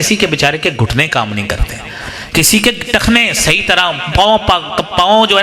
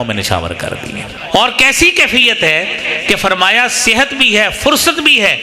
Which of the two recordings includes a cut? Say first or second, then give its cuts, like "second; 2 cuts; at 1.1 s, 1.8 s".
second; 1 cut; at 1.1 s